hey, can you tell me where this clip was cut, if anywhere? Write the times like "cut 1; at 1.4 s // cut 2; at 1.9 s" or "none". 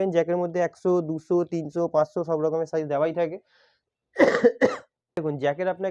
none